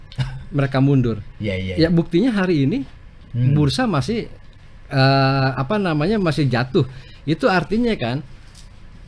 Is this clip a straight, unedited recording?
yes; 0 cuts

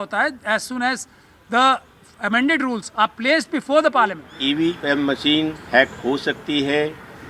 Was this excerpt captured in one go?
no; 1 cut; at 4.3 s

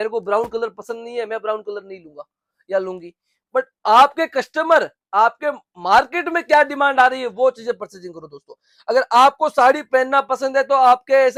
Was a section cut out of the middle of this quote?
no; 0 cuts

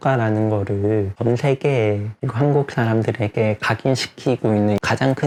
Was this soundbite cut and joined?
no; 0 cuts

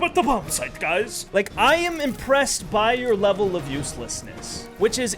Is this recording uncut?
no; 1 cut; at 1.2 s

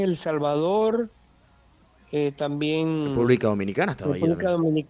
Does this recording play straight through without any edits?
yes; 0 cuts

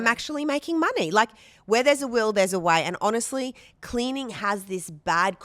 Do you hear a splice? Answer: no; 0 cuts

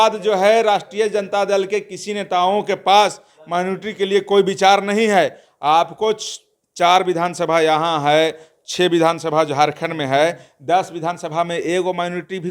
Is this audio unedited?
yes; 0 cuts

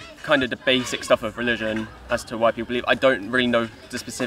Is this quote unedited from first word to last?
yes; 0 cuts

